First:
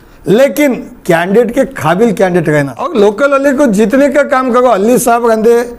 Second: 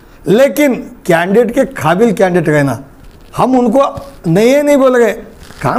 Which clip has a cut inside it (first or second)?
first